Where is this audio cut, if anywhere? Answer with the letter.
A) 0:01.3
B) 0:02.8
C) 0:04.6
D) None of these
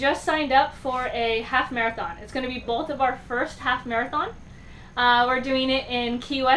D